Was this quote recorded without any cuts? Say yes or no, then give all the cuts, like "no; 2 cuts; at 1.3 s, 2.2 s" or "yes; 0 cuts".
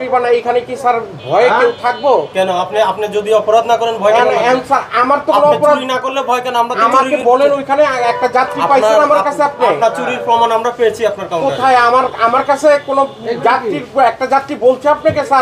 yes; 0 cuts